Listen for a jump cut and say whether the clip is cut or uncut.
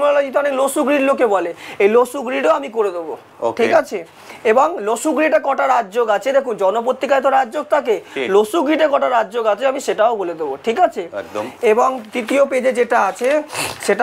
uncut